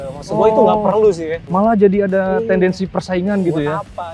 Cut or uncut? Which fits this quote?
uncut